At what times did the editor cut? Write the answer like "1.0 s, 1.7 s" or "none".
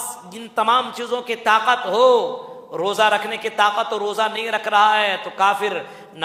none